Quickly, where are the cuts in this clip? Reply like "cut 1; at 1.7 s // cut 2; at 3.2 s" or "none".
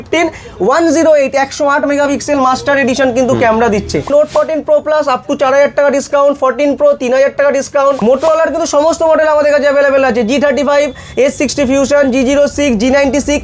cut 1; at 4.1 s // cut 2; at 8.0 s